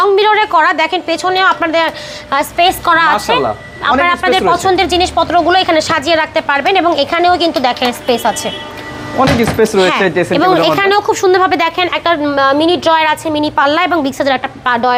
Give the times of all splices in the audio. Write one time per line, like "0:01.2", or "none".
none